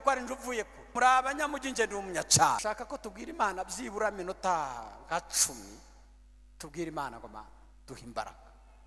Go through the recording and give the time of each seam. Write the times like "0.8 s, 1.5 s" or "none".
0.9 s, 2.6 s

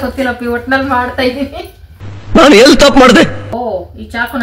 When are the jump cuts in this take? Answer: 3.4 s

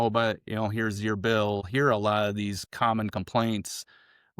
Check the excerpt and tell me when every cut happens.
1.7 s

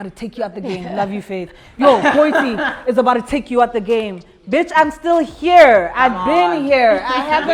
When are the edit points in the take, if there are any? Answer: none

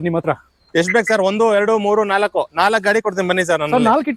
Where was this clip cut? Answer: none

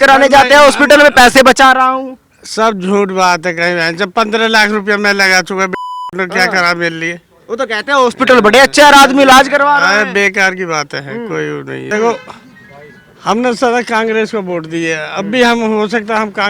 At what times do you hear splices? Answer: 11.8 s

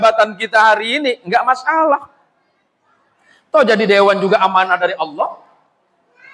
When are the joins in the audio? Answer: none

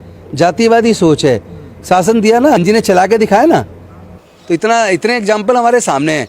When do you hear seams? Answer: 2.6 s

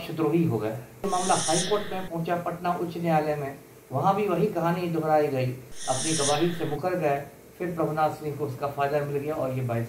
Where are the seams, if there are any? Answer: 1.1 s, 5.7 s

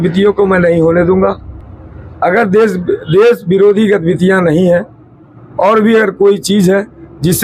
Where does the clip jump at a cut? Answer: none

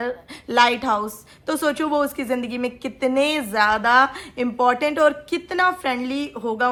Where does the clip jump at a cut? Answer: none

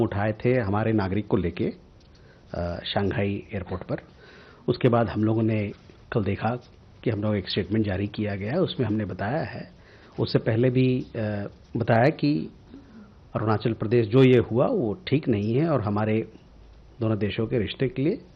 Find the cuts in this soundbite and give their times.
none

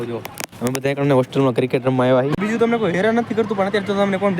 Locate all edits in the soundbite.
2.4 s

